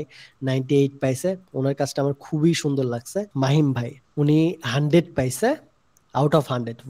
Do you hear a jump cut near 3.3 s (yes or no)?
yes